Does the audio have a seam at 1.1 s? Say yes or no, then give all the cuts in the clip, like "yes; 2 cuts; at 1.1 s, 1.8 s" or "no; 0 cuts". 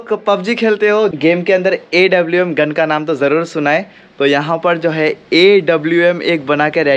yes; 1 cut; at 1.1 s